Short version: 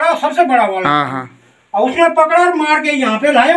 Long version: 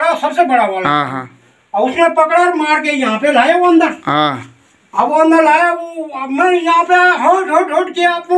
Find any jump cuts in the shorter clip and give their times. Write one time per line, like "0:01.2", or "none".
none